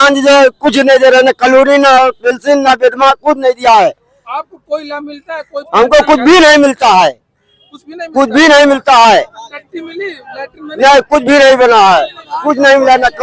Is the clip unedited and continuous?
yes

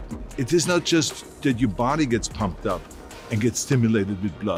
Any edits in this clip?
no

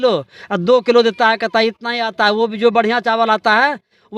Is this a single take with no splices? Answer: yes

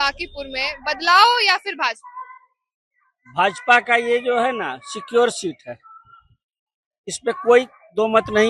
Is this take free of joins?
yes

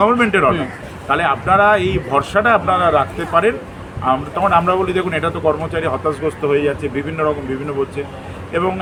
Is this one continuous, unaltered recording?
yes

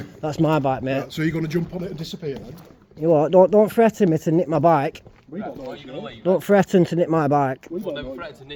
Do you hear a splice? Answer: no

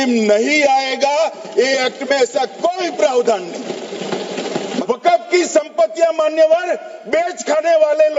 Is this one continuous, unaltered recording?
no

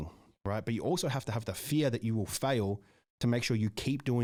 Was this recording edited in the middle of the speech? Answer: no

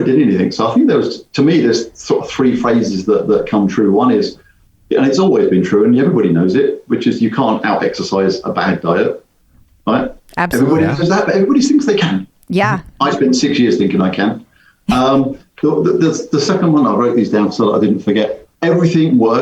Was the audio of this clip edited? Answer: yes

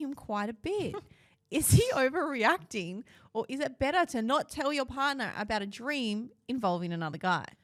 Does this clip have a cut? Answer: no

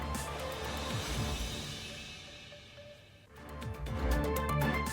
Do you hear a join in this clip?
yes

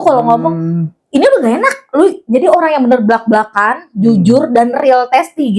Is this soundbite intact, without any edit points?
yes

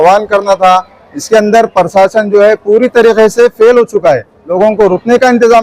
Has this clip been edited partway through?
yes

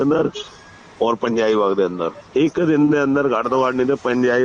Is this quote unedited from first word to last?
no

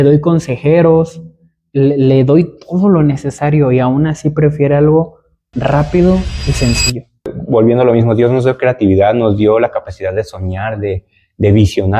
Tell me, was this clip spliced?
yes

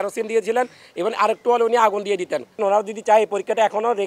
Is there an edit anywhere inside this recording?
yes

